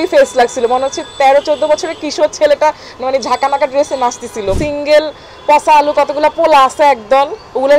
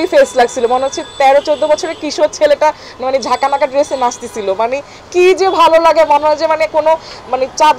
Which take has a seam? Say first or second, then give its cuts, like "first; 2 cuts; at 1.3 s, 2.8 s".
first; 1 cut; at 4.5 s